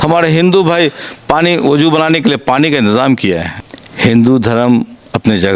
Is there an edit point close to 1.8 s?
no; 1 cut; at 3.5 s

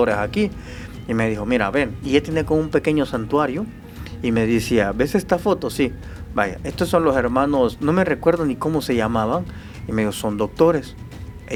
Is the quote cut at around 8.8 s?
no; 0 cuts

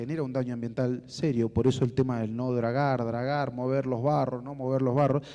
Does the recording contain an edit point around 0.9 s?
no; 1 cut; at 3.3 s

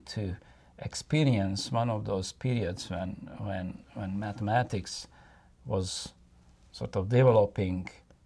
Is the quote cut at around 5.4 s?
no; 0 cuts

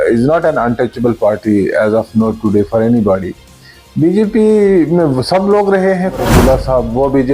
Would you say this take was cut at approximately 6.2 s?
yes; 1 cut; at 6.2 s

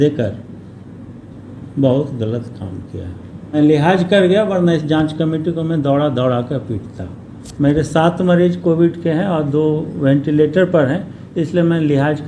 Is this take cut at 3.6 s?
yes; 1 cut; at 3.6 s

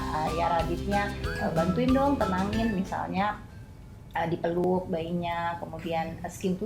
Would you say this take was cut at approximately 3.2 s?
no; 1 cut; at 4.6 s

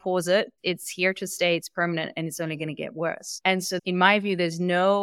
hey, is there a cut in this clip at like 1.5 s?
no; 1 cut; at 3.8 s

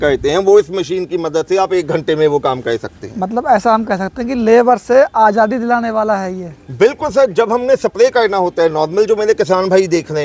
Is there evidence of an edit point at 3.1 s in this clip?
no; 0 cuts

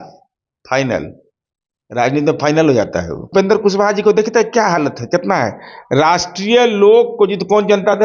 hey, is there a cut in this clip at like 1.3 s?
no; 1 cut; at 3.3 s

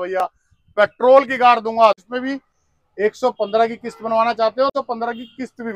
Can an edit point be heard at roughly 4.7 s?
yes; 2 cuts; at 2.0 s, 4.7 s

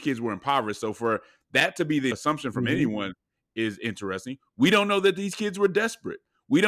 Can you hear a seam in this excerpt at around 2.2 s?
yes; 1 cut; at 2.2 s

